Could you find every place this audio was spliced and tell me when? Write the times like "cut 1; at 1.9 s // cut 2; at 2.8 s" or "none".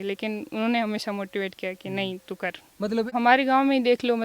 cut 1; at 3.1 s